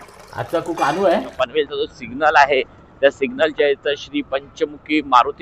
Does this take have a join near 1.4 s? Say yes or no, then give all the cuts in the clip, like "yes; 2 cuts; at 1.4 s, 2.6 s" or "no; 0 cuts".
yes; 1 cut; at 1.4 s